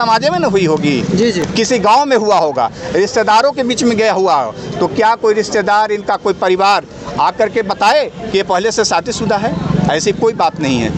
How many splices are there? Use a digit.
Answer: 0